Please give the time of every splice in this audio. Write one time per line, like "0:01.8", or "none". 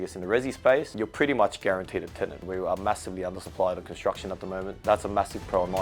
0:02.4
0:03.4
0:04.7